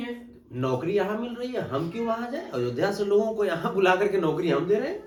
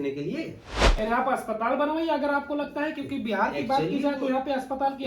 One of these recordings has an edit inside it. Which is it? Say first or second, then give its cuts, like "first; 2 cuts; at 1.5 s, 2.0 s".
second; 1 cut; at 0.9 s